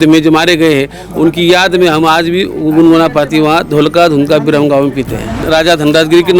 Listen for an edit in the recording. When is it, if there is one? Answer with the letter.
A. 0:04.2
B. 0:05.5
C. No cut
B